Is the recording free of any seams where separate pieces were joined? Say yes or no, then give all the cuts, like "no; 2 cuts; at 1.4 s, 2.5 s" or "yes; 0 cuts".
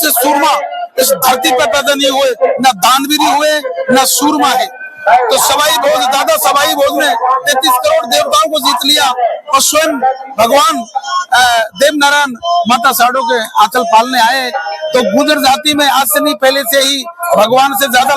yes; 0 cuts